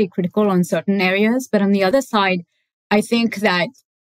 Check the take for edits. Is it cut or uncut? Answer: cut